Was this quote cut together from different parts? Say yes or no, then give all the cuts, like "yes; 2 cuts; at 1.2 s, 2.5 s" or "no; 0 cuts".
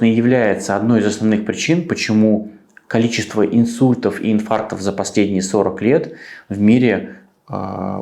no; 0 cuts